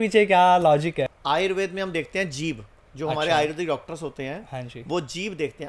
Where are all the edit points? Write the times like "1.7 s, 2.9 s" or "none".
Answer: 1.2 s